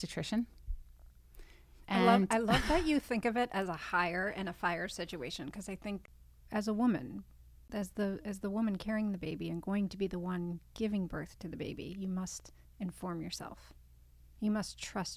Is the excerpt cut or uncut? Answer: cut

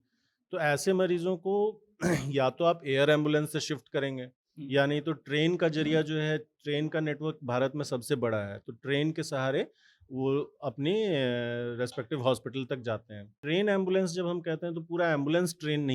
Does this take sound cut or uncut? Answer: cut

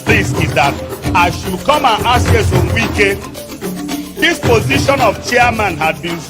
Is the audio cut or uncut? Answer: uncut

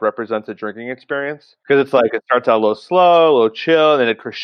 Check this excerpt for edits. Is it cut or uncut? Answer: cut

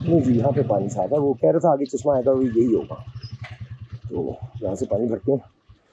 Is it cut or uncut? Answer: uncut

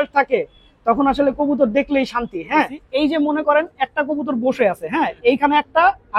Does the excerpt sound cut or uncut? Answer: cut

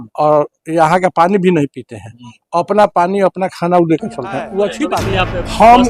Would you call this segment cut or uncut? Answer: cut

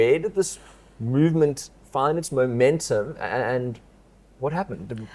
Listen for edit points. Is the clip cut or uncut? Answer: uncut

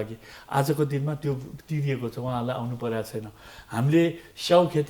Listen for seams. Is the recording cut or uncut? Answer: uncut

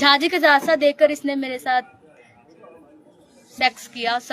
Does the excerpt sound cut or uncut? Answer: uncut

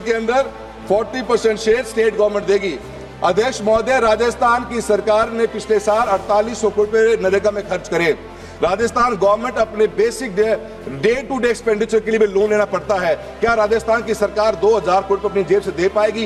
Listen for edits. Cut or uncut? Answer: uncut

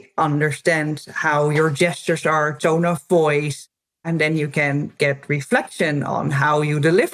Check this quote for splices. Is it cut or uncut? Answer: cut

